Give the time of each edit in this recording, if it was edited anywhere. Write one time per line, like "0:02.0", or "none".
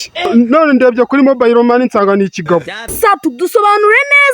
0:02.8